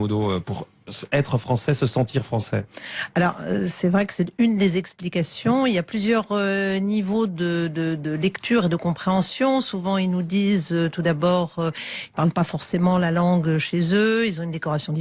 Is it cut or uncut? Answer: cut